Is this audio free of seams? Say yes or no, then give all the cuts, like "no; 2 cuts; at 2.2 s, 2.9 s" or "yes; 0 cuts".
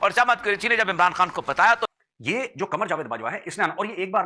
no; 1 cut; at 1.9 s